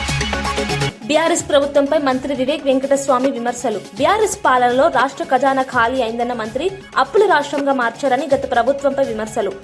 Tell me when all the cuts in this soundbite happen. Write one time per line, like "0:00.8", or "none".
0:00.9